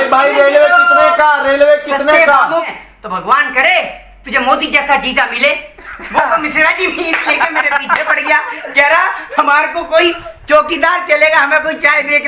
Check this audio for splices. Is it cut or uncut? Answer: cut